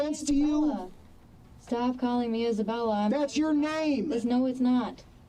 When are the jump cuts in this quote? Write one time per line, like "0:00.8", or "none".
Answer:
none